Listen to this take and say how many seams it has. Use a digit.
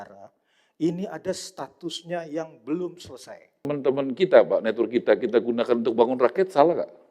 1